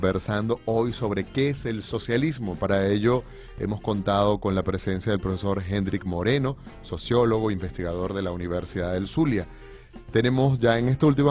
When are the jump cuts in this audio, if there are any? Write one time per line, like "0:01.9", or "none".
0:03.4